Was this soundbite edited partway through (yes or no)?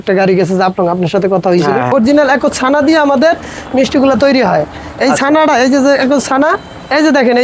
yes